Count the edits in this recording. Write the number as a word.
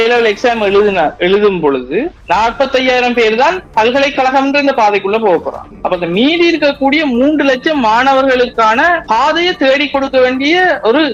zero